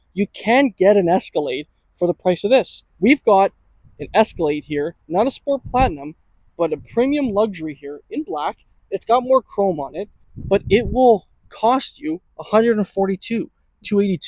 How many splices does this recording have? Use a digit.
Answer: 1